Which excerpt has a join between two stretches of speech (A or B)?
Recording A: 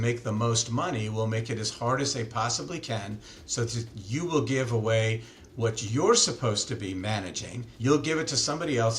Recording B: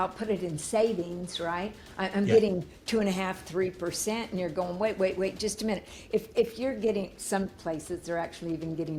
A